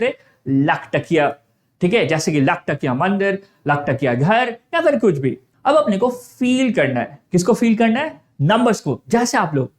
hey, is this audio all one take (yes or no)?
no